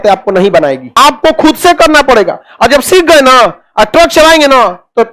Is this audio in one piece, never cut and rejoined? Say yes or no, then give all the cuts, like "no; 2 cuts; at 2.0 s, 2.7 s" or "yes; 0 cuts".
no; 1 cut; at 1.0 s